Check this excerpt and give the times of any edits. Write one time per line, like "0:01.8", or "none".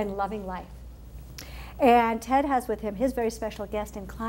0:02.5